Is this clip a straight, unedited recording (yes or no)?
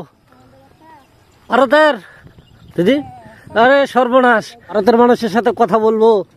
no